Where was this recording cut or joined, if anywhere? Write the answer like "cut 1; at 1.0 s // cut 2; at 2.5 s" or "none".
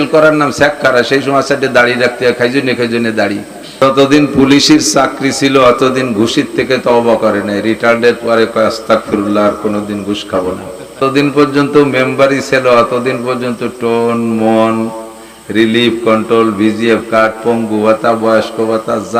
cut 1; at 3.8 s // cut 2; at 11.0 s

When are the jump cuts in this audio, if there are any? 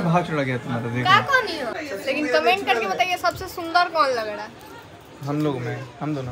cut 1; at 1.8 s

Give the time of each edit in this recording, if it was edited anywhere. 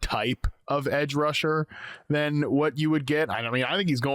none

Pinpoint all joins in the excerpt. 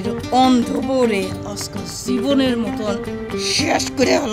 none

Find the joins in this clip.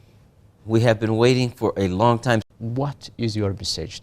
cut 1; at 2.4 s

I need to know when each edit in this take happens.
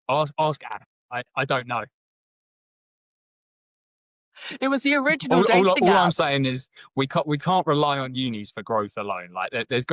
none

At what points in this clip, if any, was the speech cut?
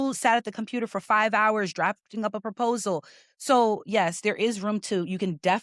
none

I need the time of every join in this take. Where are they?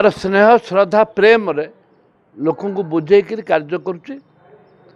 none

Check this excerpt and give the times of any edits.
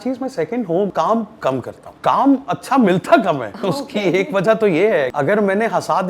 cut 1; at 0.9 s // cut 2; at 1.8 s // cut 3; at 3.5 s // cut 4; at 5.1 s

